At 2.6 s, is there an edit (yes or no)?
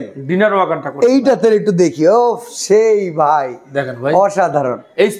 no